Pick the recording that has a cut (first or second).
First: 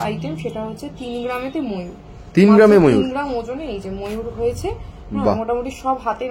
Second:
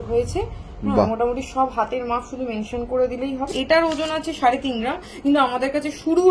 second